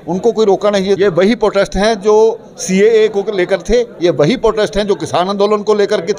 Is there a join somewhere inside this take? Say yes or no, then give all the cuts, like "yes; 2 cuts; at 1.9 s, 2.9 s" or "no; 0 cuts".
yes; 1 cut; at 1.0 s